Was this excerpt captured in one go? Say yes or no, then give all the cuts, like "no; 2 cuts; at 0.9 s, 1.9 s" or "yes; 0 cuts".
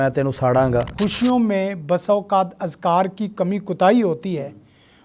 no; 1 cut; at 0.9 s